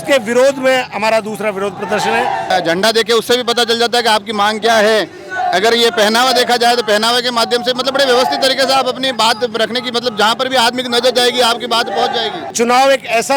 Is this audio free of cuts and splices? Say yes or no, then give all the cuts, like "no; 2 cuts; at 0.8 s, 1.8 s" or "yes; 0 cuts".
no; 2 cuts; at 2.5 s, 12.4 s